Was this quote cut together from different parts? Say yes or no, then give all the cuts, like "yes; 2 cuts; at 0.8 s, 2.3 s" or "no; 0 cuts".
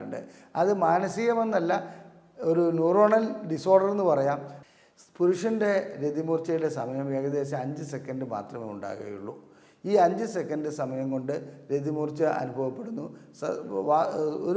yes; 1 cut; at 4.5 s